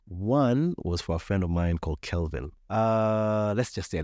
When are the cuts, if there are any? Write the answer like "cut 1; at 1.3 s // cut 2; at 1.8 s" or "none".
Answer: cut 1; at 2.5 s